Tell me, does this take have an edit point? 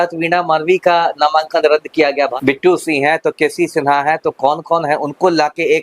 yes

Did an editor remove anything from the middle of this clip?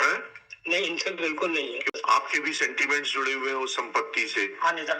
yes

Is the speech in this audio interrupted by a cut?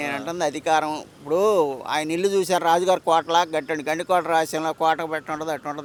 no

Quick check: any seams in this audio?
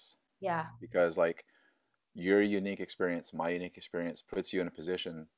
no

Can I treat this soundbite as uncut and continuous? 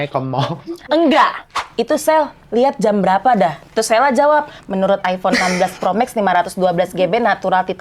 no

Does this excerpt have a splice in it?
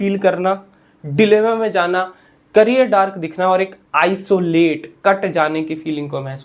no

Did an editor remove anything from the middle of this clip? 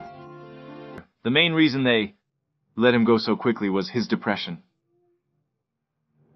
yes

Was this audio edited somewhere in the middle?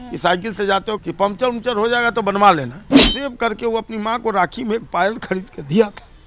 yes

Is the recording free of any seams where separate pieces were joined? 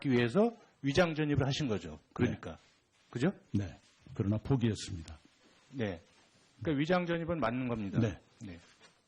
no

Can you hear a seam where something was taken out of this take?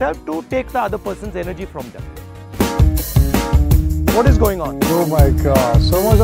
yes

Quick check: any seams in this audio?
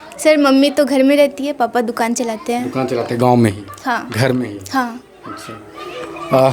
no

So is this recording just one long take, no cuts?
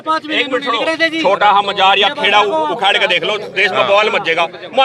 yes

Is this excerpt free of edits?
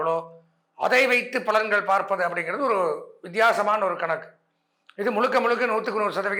yes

